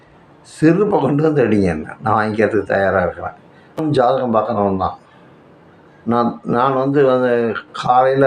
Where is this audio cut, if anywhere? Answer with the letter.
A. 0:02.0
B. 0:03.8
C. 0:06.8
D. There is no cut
B